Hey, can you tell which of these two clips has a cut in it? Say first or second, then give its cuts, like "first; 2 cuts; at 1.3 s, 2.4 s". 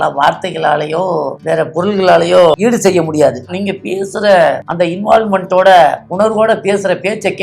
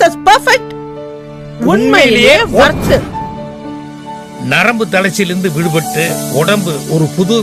first; 5 cuts; at 1.4 s, 2.6 s, 3.5 s, 4.6 s, 6.0 s